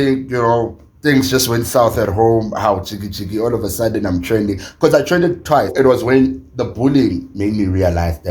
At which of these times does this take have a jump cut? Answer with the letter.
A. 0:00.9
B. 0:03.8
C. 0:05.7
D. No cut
C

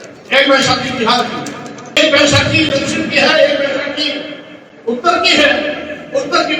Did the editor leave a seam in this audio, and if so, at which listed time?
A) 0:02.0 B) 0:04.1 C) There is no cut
A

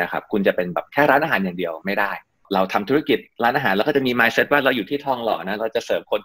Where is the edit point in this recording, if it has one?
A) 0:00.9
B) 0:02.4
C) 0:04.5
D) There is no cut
B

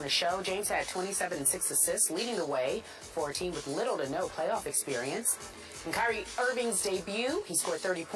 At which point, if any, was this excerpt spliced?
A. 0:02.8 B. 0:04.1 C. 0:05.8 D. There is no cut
D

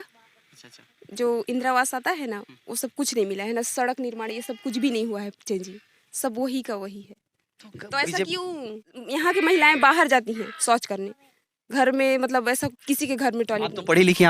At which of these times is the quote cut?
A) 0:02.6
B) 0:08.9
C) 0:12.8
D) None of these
B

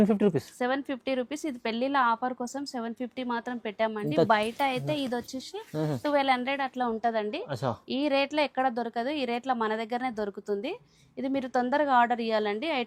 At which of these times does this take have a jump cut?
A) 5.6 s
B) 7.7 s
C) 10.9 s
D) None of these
D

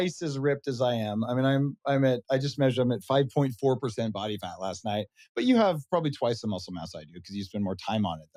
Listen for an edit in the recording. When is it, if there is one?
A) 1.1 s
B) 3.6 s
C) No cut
C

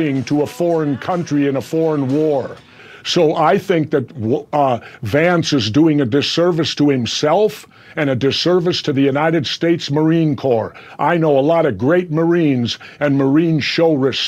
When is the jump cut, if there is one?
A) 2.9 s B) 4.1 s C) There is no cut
A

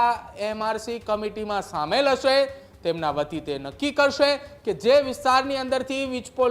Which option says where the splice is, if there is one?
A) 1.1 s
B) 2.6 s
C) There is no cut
C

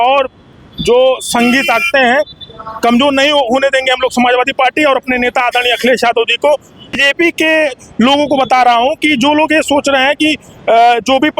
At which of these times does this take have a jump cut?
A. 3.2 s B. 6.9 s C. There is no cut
B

